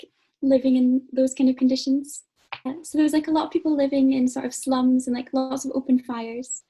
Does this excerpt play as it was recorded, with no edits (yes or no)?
no